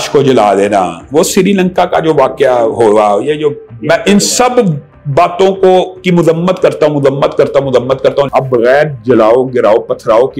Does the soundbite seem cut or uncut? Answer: cut